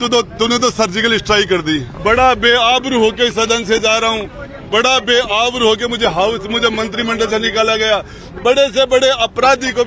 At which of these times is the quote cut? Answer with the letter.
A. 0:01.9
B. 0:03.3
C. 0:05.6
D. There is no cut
A